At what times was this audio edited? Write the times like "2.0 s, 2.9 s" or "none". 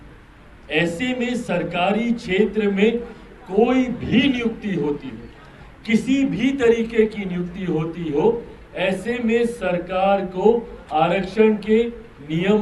none